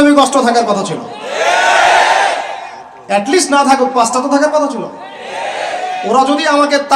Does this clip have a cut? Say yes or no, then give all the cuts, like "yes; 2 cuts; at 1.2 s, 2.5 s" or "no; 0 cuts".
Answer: no; 0 cuts